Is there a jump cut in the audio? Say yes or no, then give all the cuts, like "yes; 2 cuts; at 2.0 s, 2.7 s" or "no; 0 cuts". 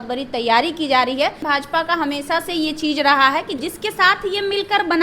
yes; 2 cuts; at 1.4 s, 3.6 s